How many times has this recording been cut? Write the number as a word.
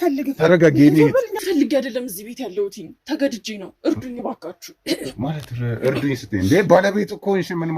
one